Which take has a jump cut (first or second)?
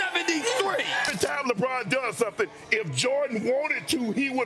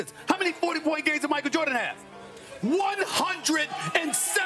first